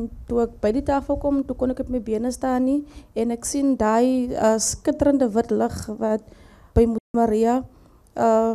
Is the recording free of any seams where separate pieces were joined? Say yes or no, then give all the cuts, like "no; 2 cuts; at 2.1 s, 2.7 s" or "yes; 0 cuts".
no; 1 cut; at 6.6 s